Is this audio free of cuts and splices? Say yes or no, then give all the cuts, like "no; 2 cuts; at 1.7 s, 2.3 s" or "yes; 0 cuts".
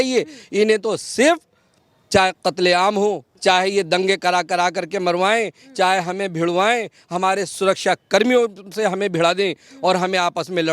no; 1 cut; at 3.3 s